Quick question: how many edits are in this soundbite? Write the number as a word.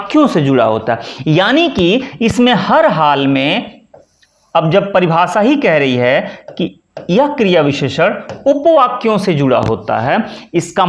zero